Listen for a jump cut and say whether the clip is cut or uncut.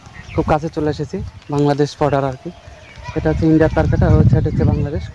uncut